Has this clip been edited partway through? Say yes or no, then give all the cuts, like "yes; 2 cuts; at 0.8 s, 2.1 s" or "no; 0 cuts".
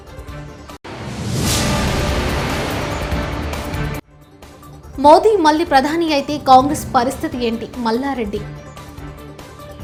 no; 0 cuts